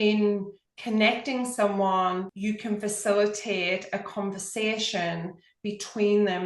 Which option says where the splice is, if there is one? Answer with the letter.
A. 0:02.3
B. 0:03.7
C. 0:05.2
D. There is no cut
A